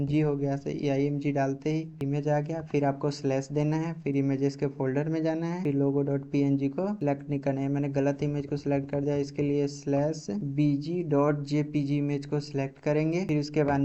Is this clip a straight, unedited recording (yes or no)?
yes